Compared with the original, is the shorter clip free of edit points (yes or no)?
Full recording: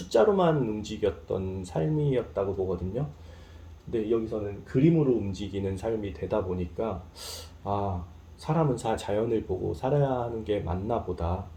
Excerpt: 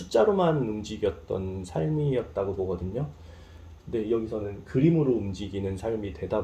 yes